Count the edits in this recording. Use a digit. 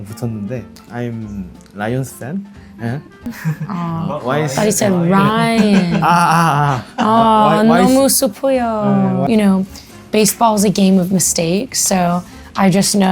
2